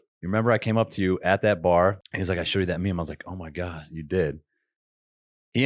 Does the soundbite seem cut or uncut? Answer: cut